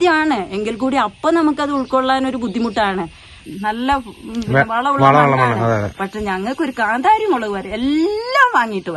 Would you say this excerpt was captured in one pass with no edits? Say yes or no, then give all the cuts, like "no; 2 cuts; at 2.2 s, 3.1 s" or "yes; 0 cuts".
no; 1 cut; at 3.4 s